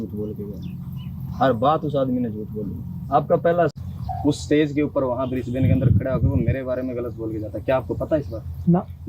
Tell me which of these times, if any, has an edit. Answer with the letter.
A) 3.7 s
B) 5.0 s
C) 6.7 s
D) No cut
A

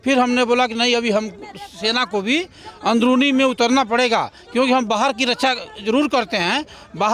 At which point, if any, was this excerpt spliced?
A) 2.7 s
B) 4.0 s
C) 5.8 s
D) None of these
D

